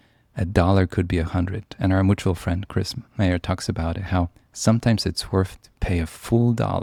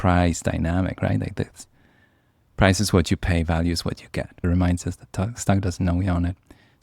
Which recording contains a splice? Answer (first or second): second